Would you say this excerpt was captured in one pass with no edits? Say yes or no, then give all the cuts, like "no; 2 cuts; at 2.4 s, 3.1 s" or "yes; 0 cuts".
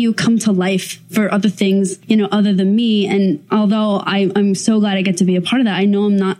no; 2 cuts; at 2.0 s, 3.4 s